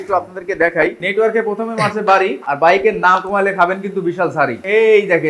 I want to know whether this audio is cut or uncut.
uncut